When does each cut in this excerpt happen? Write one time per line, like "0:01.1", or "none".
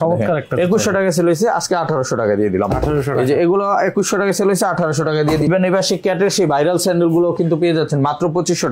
0:05.5